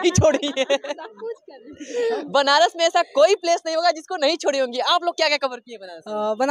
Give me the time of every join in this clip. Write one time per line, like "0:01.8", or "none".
none